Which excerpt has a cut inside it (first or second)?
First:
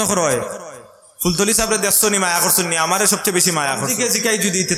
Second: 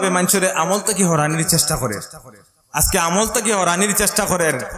first